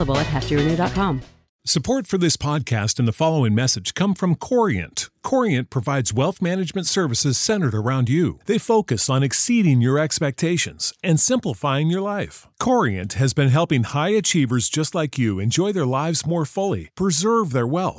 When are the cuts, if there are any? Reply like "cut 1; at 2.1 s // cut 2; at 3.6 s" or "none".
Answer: cut 1; at 1.5 s